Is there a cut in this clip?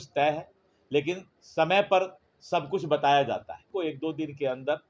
yes; 2 cuts; at 1.3 s, 3.7 s

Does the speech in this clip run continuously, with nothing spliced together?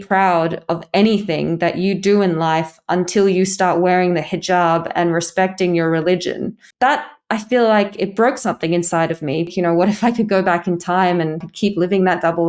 no; 2 cuts; at 9.5 s, 11.5 s

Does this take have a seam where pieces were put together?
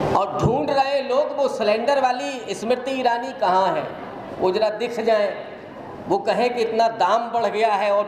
no; 0 cuts

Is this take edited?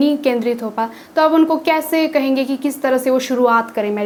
no; 0 cuts

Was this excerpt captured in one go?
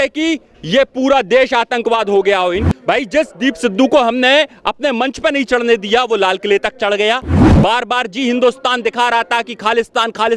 no; 2 cuts; at 2.6 s, 7.4 s

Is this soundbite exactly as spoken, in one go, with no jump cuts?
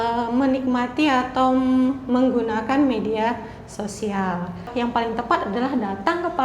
no; 1 cut; at 4.7 s

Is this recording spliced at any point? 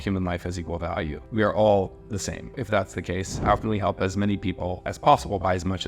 yes; 3 cuts; at 1.2 s, 2.6 s, 4.9 s

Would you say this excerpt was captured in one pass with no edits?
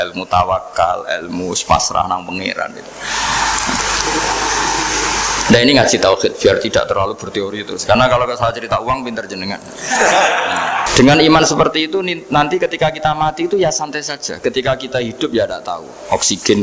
no; 2 cuts; at 3.8 s, 10.9 s

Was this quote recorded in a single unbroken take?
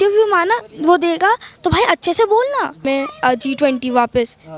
no; 1 cut; at 2.8 s

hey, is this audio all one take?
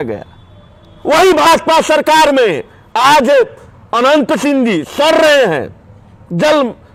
yes; 0 cuts

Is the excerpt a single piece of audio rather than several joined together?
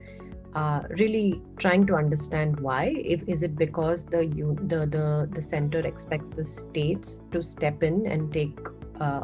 yes; 0 cuts

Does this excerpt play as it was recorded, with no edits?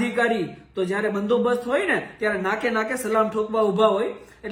yes; 0 cuts

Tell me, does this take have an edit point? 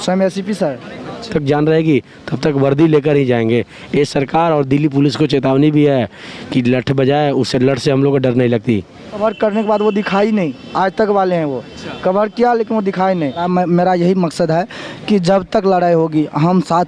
yes; 3 cuts; at 1.3 s, 9.2 s, 13.4 s

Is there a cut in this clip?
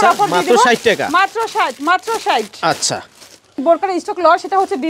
no; 0 cuts

